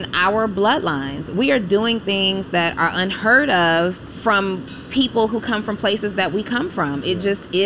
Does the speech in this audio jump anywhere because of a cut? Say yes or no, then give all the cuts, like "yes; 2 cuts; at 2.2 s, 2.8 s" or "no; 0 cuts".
yes; 1 cut; at 4.1 s